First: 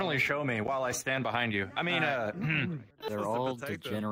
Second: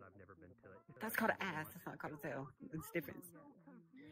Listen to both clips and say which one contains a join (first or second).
first